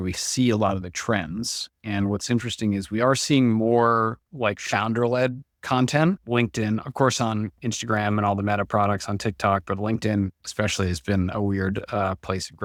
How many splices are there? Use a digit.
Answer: 0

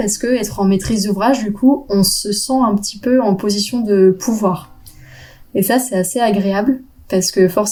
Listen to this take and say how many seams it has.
0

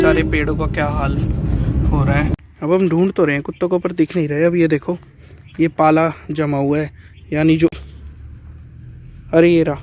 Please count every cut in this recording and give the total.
2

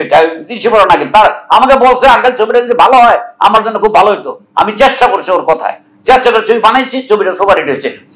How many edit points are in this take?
0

